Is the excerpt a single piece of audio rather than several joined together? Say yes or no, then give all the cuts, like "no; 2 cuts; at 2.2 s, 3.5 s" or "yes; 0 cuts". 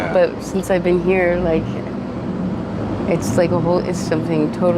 yes; 0 cuts